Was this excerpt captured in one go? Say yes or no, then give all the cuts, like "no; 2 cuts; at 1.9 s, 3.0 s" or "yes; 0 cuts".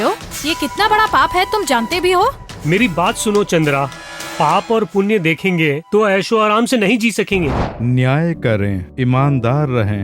no; 1 cut; at 7.7 s